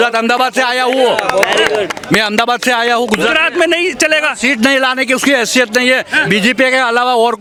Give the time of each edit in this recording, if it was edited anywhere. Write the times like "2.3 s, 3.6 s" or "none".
none